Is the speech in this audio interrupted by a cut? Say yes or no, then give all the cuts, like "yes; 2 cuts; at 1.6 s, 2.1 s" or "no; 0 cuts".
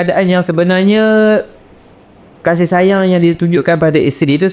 no; 0 cuts